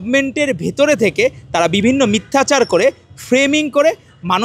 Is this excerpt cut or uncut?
uncut